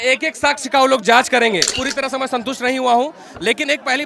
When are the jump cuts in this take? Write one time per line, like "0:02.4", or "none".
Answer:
0:01.8

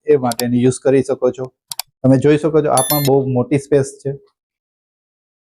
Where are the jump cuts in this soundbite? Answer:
none

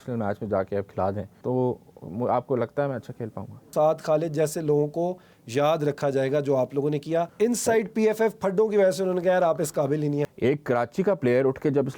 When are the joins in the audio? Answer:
0:01.3
0:03.7
0:07.3
0:10.3

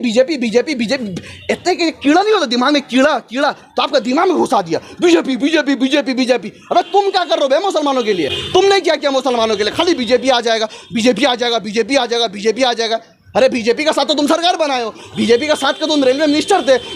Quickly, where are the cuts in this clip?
none

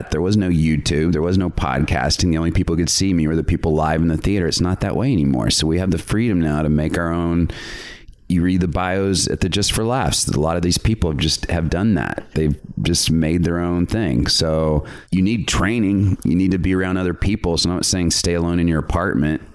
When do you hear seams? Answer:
0:15.0

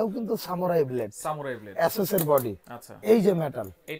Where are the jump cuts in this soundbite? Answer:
none

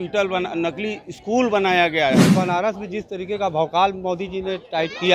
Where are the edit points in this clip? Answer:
0:02.3

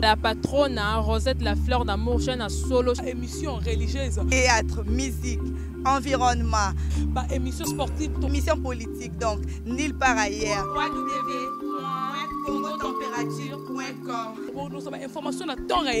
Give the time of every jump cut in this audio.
none

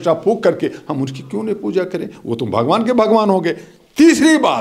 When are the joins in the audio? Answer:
none

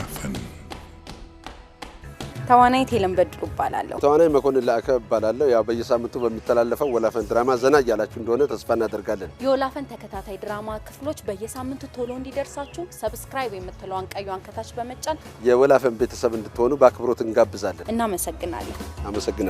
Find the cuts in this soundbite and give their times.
0:03.9
0:17.8

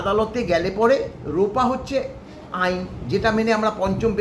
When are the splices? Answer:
none

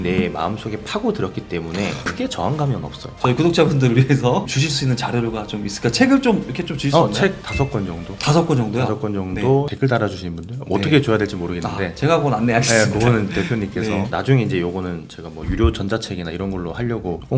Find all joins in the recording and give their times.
0:02.1
0:03.1

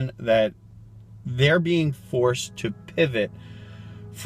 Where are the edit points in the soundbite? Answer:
none

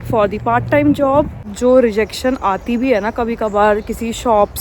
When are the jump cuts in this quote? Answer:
0:01.4

